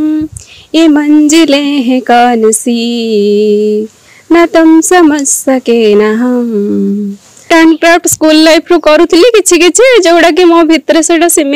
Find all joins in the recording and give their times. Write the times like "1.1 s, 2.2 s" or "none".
7.5 s